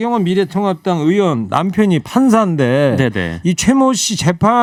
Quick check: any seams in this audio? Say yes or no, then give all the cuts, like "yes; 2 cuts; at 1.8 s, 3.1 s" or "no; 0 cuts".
no; 0 cuts